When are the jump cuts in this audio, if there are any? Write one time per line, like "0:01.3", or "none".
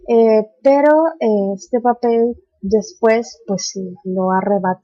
0:03.6